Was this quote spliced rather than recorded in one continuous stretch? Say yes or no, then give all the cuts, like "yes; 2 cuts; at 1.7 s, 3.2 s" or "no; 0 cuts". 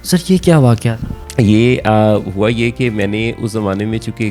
no; 0 cuts